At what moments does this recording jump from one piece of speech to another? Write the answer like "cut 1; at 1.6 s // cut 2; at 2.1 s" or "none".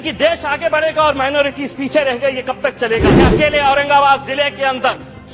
cut 1; at 3.1 s